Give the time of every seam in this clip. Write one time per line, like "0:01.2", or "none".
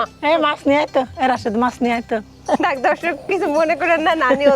none